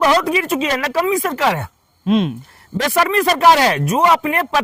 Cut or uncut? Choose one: uncut